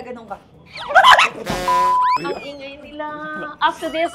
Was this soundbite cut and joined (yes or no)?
yes